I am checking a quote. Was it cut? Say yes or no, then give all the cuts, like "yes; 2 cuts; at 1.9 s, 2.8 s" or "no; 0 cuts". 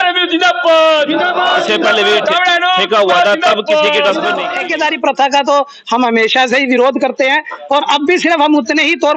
yes; 1 cut; at 4.6 s